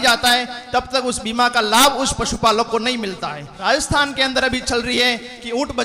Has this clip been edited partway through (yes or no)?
yes